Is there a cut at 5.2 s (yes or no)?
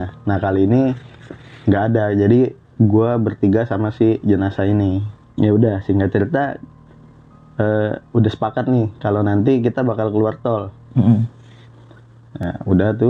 yes